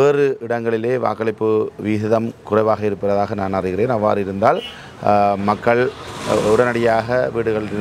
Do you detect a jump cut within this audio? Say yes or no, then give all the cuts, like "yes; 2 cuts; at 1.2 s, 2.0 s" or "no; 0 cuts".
no; 0 cuts